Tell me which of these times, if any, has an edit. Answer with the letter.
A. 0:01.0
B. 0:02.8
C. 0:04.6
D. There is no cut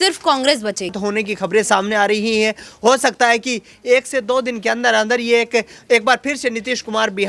A